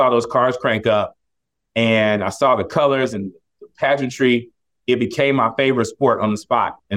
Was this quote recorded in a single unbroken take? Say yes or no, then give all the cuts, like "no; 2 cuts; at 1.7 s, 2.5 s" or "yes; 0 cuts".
yes; 0 cuts